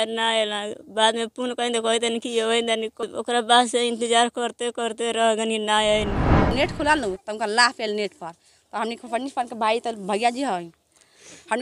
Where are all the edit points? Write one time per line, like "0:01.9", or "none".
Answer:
0:03.0
0:06.5